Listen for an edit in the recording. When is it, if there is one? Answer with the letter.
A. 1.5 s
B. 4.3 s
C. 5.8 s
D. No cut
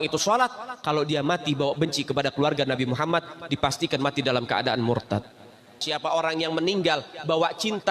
C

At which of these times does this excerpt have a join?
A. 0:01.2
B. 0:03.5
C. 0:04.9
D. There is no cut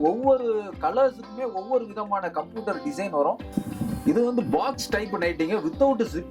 B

